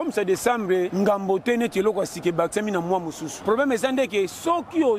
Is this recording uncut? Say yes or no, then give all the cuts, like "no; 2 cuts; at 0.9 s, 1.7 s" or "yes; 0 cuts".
no; 2 cuts; at 0.9 s, 3.3 s